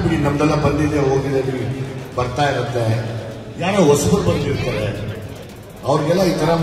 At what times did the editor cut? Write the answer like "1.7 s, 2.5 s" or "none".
none